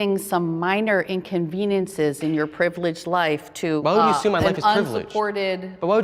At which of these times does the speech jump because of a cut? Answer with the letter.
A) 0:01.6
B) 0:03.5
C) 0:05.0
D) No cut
D